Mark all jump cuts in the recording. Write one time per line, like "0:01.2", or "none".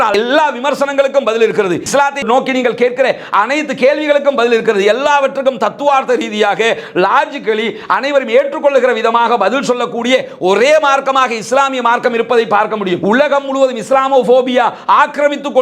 none